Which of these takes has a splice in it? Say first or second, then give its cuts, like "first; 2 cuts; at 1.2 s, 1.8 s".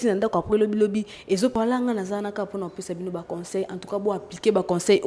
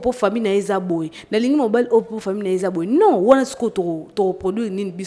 first; 1 cut; at 1.5 s